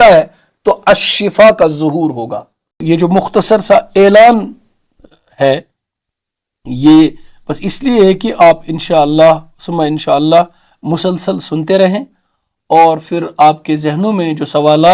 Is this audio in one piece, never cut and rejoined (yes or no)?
no